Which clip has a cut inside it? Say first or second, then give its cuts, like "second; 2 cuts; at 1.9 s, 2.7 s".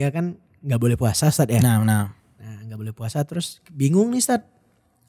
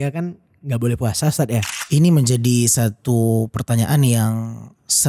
second; 1 cut; at 1.6 s